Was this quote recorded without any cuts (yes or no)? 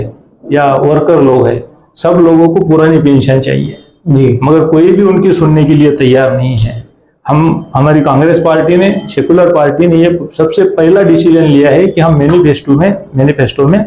yes